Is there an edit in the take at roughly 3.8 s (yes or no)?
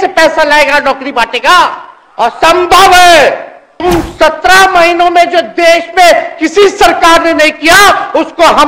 yes